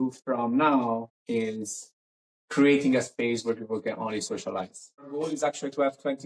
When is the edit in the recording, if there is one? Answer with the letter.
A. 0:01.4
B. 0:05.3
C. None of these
B